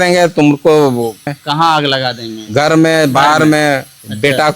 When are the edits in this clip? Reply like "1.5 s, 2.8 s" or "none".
1.4 s